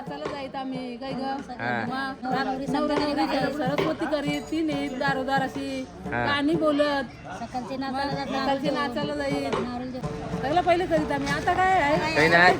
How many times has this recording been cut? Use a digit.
2